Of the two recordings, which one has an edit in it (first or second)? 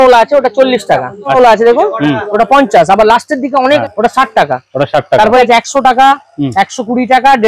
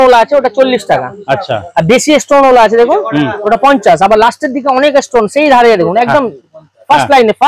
first